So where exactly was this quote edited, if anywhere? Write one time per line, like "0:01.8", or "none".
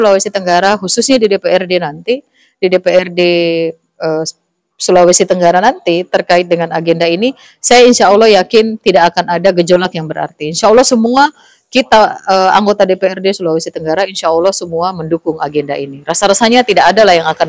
none